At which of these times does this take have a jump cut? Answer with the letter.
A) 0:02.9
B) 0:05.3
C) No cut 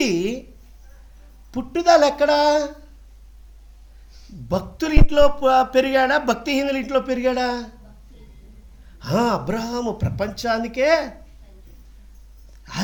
C